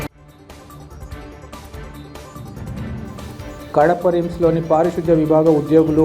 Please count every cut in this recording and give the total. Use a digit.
1